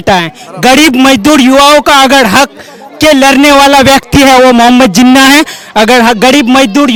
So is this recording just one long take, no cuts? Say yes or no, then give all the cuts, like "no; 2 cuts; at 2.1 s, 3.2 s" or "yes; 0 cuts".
yes; 0 cuts